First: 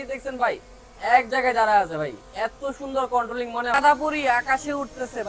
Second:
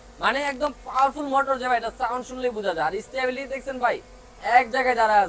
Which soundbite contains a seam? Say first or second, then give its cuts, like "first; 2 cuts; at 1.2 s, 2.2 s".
first; 1 cut; at 3.7 s